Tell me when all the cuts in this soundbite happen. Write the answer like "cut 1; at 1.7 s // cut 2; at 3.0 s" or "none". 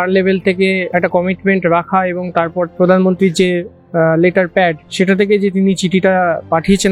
cut 1; at 0.8 s // cut 2; at 2.7 s // cut 3; at 4.8 s